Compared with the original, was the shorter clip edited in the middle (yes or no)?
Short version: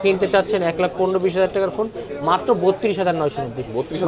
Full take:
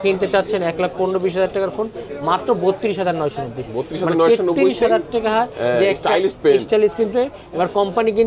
no